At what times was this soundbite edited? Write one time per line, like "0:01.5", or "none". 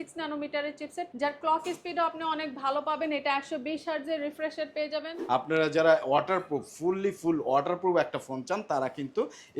0:01.1
0:05.1

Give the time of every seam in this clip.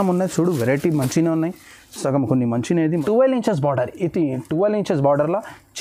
0:02.9

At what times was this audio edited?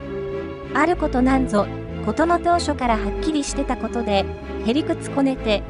0:02.8

